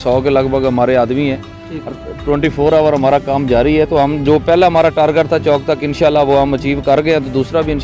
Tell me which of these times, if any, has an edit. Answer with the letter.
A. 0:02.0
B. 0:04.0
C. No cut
C